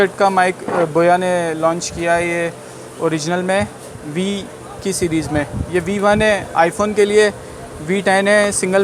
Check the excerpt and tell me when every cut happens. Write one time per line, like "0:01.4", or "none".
none